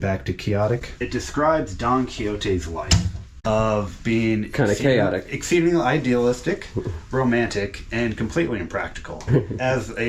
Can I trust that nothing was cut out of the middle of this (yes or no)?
no